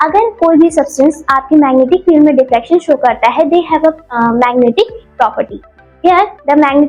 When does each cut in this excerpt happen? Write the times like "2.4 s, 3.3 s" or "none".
none